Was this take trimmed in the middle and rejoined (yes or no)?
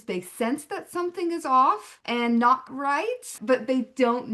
yes